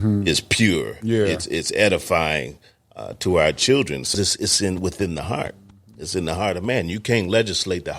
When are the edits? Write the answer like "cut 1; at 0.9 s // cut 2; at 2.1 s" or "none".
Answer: cut 1; at 4.1 s